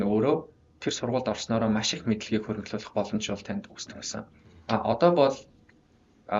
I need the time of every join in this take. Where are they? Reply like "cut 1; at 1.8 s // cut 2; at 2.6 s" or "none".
none

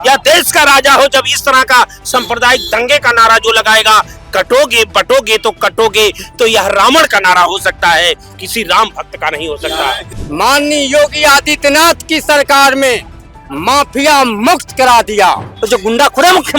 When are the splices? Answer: cut 1; at 10.1 s // cut 2; at 15.6 s

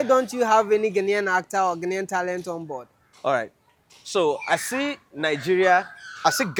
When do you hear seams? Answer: none

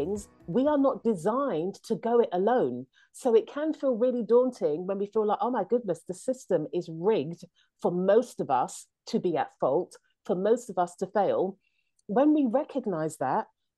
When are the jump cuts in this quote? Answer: none

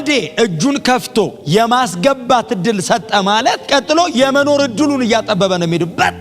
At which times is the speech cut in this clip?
cut 1; at 3.6 s

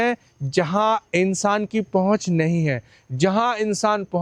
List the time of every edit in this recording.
none

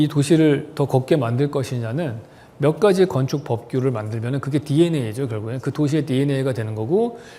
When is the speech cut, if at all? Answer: none

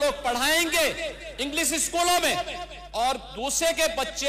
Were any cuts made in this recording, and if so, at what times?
none

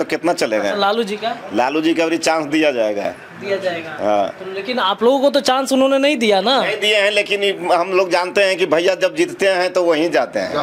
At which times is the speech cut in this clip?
none

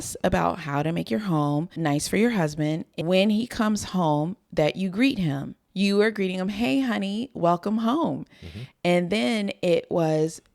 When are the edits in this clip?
cut 1; at 2.9 s // cut 2; at 5.6 s

